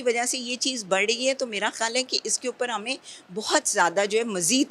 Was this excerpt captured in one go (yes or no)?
yes